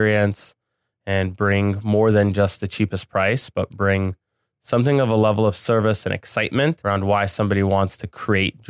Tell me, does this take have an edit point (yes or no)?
yes